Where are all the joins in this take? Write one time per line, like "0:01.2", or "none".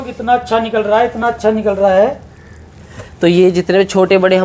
none